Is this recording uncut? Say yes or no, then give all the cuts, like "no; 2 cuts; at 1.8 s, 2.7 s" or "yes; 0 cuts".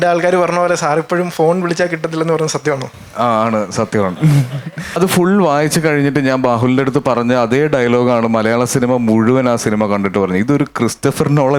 no; 1 cut; at 5.0 s